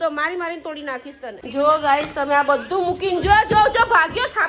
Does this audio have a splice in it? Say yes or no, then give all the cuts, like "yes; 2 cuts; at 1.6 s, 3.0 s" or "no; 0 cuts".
yes; 1 cut; at 1.4 s